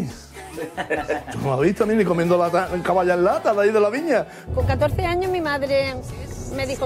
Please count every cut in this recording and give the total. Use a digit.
1